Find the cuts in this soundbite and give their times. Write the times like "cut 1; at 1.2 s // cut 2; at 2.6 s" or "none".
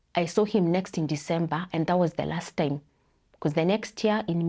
none